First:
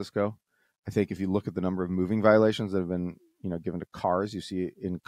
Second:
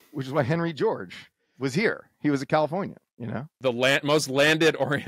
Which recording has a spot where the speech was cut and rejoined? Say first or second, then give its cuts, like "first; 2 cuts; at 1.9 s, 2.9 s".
second; 1 cut; at 3.5 s